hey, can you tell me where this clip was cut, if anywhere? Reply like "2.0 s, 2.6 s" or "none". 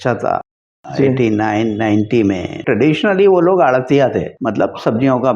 2.6 s, 4.4 s